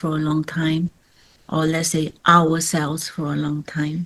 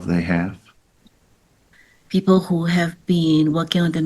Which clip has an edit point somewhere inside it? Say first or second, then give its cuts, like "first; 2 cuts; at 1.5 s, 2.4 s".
second; 1 cut; at 1.0 s